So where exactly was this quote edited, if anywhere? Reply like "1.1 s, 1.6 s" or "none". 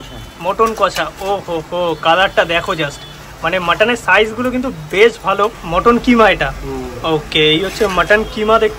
5.6 s

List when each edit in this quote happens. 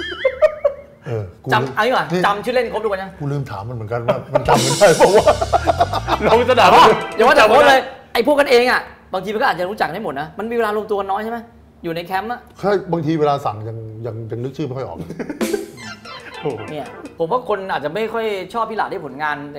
17.0 s

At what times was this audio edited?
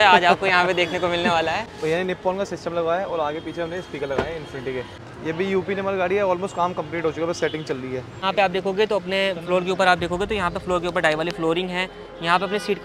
1.7 s, 5.0 s, 8.2 s

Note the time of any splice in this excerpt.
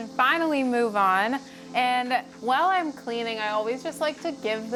none

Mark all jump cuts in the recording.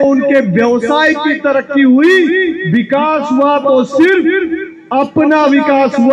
none

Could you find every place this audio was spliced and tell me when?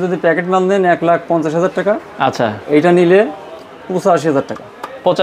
none

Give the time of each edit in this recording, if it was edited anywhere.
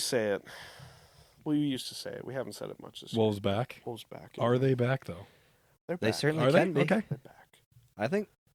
none

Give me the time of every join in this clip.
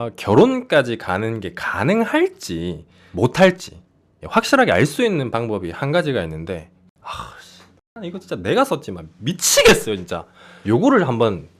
6.8 s

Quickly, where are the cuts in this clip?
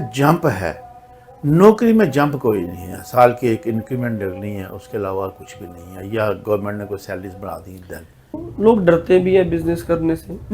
8.5 s

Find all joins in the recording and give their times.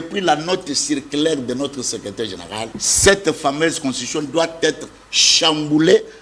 2.7 s

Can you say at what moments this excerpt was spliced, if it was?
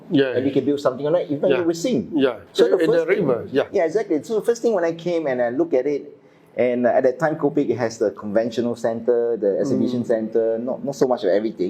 none

